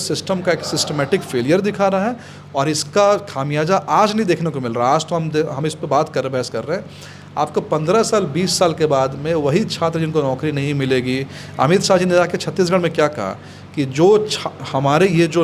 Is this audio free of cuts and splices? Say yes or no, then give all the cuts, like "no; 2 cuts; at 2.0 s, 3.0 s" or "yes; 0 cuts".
yes; 0 cuts